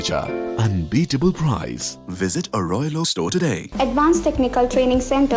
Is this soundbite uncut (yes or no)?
no